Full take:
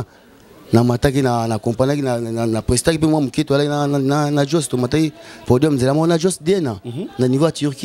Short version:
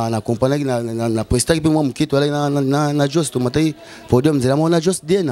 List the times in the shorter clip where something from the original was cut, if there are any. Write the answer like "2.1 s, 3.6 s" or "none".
none